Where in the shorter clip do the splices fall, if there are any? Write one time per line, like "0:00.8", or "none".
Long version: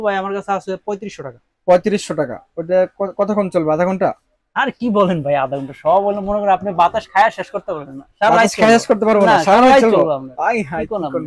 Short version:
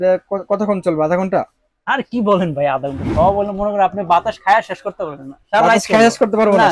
none